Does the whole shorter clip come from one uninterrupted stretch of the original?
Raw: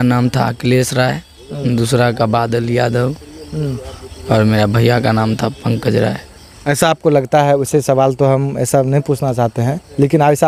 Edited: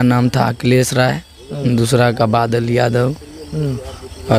yes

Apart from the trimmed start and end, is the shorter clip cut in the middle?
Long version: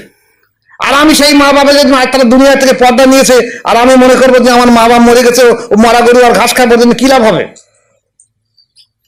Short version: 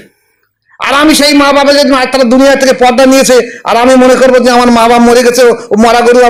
no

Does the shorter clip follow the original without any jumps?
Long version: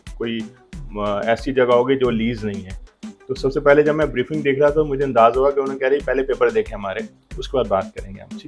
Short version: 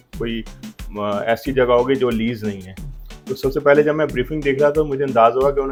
yes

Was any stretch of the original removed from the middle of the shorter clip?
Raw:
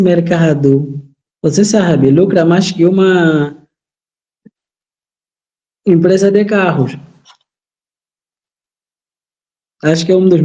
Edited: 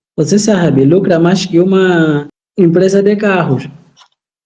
yes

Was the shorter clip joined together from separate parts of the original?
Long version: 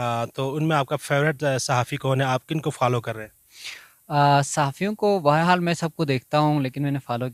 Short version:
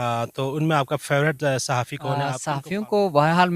yes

